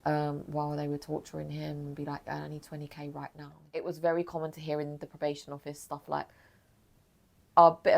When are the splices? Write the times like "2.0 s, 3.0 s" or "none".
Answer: 3.6 s